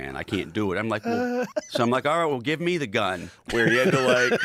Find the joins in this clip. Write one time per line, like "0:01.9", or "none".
none